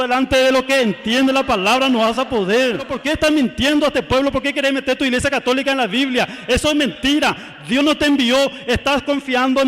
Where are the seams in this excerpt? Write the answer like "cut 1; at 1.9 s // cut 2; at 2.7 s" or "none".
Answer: cut 1; at 2.9 s